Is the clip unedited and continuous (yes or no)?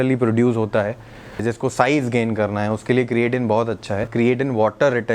no